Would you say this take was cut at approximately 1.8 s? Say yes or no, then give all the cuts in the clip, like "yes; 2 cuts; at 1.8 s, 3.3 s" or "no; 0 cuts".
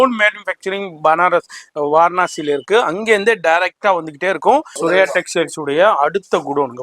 no; 1 cut; at 4.8 s